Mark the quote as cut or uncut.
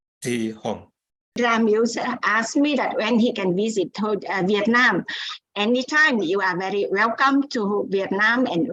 cut